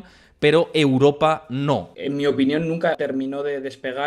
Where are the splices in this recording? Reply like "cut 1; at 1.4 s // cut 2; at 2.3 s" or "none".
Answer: cut 1; at 1.9 s // cut 2; at 3.0 s